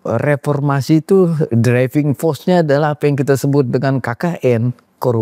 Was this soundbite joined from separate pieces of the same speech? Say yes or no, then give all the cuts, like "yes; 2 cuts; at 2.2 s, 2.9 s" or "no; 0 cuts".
no; 0 cuts